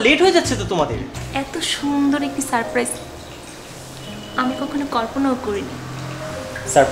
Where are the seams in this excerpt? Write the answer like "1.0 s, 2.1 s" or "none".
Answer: 1.2 s